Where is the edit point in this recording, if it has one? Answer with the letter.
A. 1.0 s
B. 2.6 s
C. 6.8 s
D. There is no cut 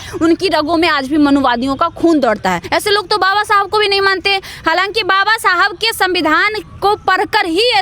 B